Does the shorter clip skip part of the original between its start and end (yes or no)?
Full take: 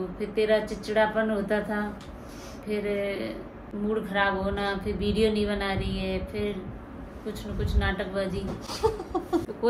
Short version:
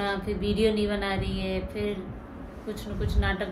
no